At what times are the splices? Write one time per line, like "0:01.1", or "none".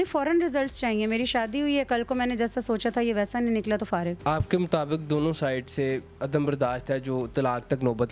0:04.2